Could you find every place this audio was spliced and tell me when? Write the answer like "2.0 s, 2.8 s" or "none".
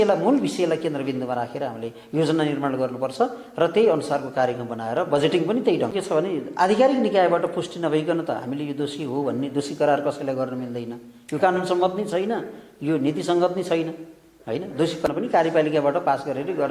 5.9 s, 15.1 s